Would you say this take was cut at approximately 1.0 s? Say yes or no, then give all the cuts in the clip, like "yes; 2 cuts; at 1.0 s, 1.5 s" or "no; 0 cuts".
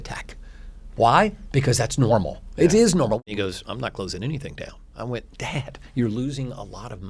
no; 1 cut; at 3.2 s